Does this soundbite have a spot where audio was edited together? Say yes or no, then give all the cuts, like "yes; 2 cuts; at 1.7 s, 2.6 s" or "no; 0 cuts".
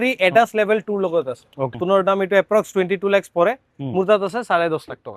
yes; 1 cut; at 1.8 s